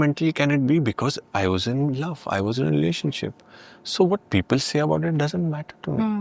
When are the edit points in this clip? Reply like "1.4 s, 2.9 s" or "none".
none